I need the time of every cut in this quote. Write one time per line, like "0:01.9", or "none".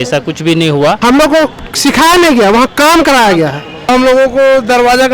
0:01.0
0:03.9